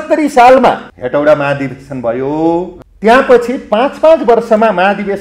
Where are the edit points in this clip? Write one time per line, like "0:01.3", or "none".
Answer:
0:00.9
0:02.8